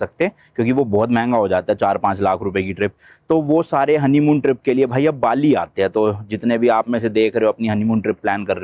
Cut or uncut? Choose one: uncut